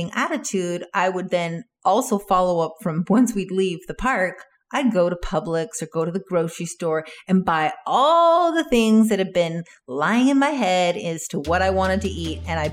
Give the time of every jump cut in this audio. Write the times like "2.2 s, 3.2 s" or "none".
none